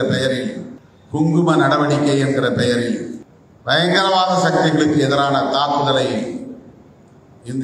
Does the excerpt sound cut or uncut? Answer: uncut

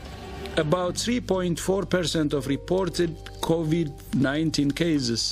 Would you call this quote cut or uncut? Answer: uncut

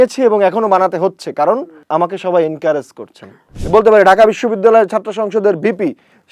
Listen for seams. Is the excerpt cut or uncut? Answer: cut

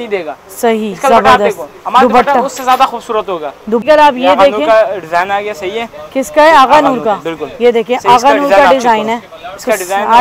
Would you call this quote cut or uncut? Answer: cut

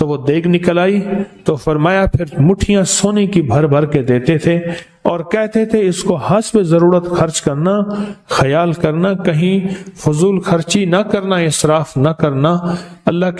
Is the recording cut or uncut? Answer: uncut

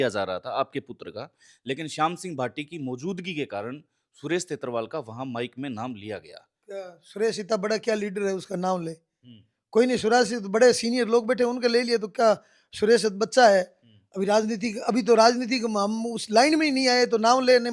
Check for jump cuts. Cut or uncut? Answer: uncut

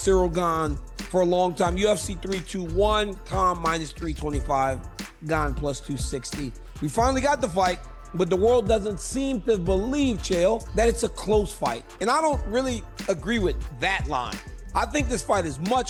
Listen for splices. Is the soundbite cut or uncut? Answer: uncut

